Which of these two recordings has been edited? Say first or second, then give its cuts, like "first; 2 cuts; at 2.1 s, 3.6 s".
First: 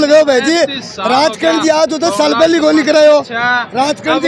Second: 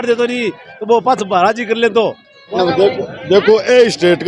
second; 1 cut; at 2.5 s